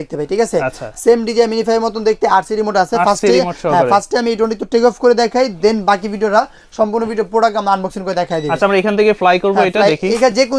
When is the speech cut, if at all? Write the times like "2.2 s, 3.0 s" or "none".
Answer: none